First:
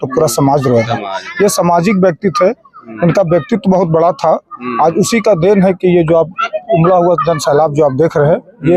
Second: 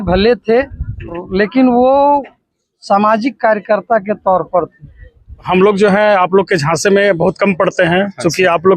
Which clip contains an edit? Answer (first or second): second